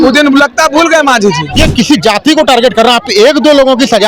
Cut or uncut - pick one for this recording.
cut